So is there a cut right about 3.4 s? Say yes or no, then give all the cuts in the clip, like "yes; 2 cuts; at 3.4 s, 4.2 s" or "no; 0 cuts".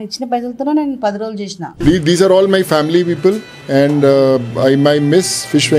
no; 1 cut; at 1.6 s